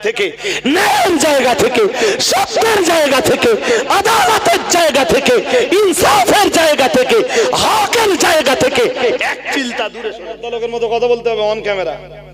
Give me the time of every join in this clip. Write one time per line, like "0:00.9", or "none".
0:10.3